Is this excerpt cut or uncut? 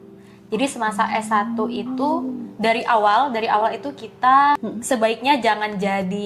uncut